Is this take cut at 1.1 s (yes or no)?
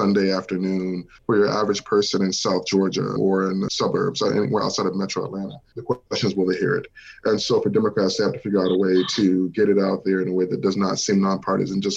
yes